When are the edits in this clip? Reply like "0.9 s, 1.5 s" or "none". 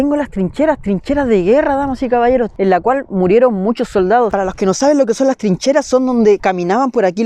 2.5 s, 4.3 s